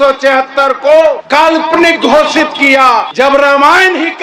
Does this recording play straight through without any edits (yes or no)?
no